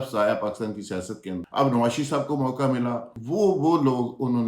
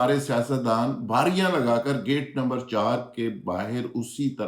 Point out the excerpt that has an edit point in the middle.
first; 2 cuts; at 1.3 s, 3.1 s

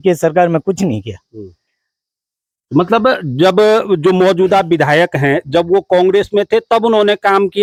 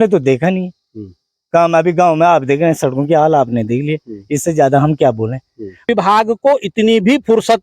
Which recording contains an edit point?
second; 1 cut; at 5.8 s

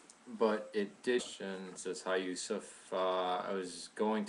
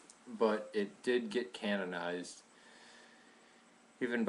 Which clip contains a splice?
second; 1 cut; at 1.3 s

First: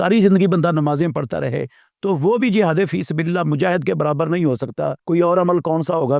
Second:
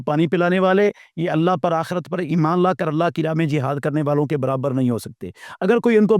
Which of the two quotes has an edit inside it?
first; 1 cut; at 5.0 s

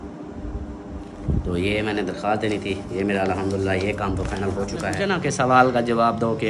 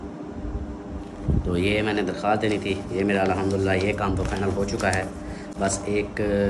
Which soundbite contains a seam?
first; 1 cut; at 4.9 s

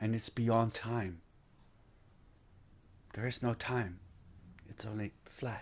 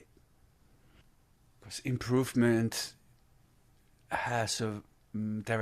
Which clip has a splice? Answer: second; 1 cut; at 1.0 s

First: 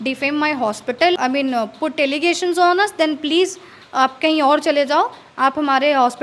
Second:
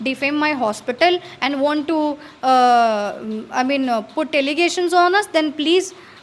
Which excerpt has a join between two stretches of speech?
first; 1 cut; at 1.2 s

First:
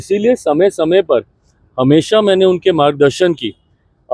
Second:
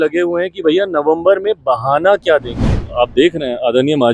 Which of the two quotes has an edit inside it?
second; 1 cut; at 2.8 s

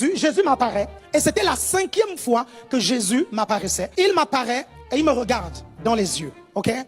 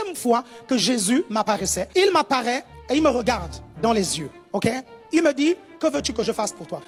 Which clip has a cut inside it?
first; 1 cut; at 1.0 s

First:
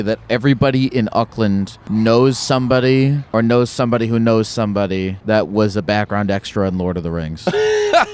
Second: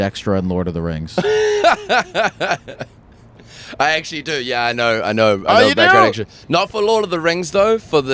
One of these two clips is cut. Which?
first; 3 cuts; at 1.8 s, 3.2 s, 5.1 s

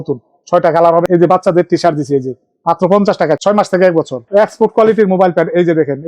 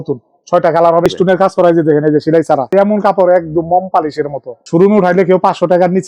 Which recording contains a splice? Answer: first; 2 cuts; at 1.1 s, 4.2 s

